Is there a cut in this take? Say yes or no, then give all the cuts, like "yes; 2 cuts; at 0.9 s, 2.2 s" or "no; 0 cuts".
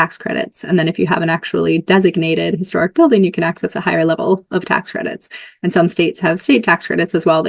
no; 0 cuts